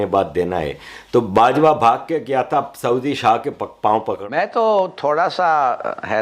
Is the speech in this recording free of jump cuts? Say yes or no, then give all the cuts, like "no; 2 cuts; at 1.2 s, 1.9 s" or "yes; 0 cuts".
no; 1 cut; at 4.2 s